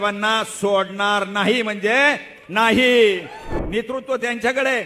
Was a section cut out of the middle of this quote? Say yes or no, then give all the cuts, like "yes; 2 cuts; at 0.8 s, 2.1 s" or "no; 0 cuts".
yes; 1 cut; at 3.5 s